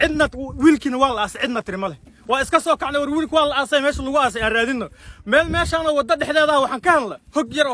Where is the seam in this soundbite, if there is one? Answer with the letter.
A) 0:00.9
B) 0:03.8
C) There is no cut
C